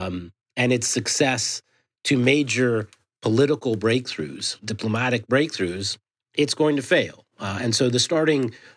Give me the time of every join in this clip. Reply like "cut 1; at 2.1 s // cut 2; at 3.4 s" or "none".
none

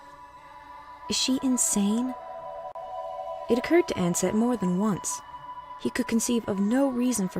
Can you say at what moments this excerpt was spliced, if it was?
cut 1; at 2.5 s

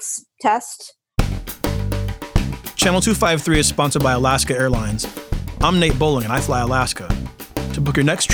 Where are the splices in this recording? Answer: cut 1; at 1.1 s

